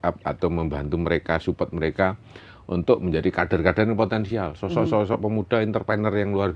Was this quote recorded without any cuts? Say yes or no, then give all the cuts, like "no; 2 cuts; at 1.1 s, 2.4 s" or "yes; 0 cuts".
yes; 0 cuts